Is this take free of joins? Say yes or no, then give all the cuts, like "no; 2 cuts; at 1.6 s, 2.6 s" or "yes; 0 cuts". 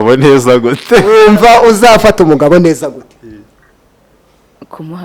no; 1 cut; at 1.1 s